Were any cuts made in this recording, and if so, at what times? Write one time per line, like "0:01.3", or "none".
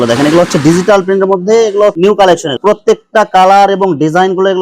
0:02.6